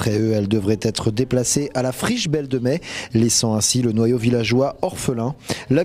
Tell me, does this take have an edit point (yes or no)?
no